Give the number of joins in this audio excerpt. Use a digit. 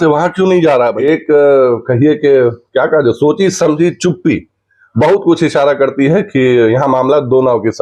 1